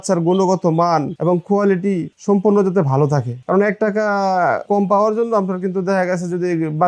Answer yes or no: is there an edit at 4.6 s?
yes